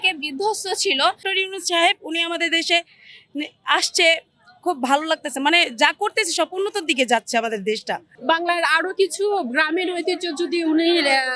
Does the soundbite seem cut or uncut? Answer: cut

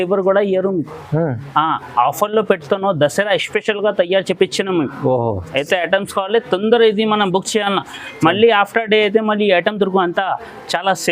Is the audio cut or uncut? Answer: uncut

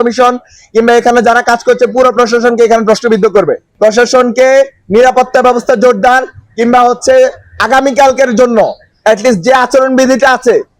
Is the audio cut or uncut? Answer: cut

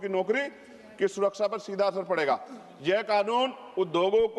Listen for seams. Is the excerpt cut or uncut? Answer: uncut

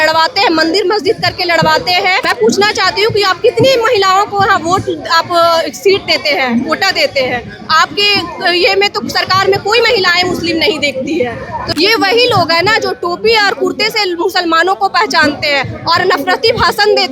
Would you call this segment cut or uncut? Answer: cut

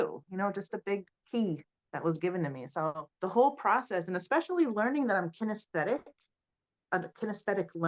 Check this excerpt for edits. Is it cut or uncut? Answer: uncut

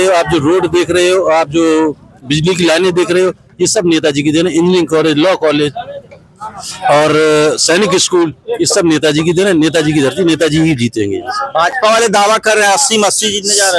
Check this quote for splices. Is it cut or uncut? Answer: uncut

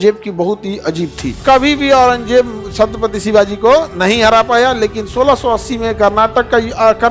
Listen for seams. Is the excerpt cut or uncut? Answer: cut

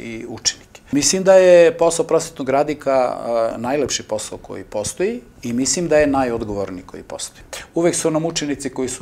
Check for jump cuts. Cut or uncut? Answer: cut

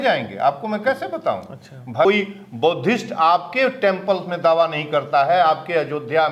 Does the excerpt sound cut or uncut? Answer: cut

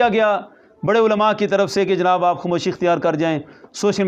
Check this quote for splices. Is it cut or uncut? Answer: uncut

